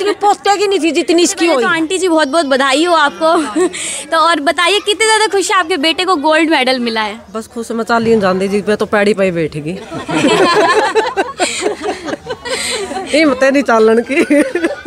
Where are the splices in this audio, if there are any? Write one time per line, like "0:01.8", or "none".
0:01.7